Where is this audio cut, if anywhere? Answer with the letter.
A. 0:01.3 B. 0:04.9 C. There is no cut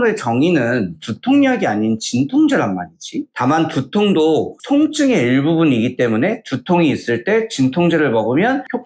C